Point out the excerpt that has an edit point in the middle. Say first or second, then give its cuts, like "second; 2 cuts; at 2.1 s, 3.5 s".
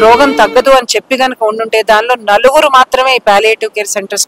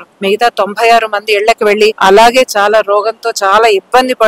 second; 1 cut; at 2.0 s